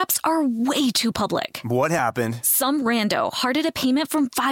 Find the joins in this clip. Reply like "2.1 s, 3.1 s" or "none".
none